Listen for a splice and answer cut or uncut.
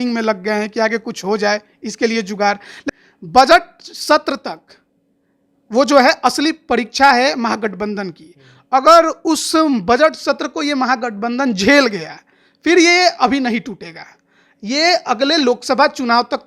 cut